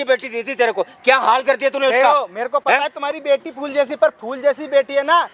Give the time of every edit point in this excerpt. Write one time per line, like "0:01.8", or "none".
none